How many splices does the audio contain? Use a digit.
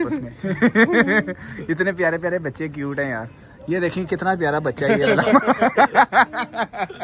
1